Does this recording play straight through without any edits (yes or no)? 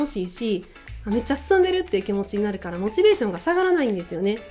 yes